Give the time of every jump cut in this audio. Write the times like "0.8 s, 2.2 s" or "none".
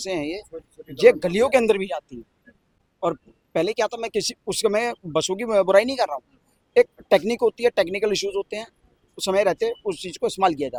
none